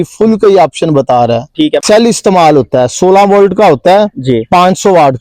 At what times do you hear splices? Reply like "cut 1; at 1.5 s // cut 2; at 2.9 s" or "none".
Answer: cut 1; at 1.8 s